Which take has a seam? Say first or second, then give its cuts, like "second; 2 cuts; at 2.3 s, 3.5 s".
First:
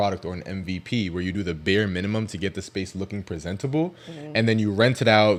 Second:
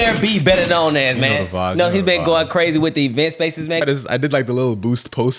second; 1 cut; at 3.8 s